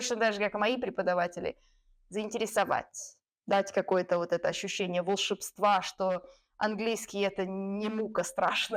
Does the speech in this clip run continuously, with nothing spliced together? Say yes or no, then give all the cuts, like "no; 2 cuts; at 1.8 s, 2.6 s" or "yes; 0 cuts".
yes; 0 cuts